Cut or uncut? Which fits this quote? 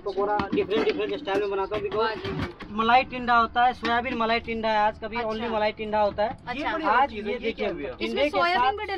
cut